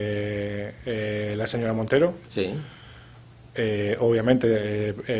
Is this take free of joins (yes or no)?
yes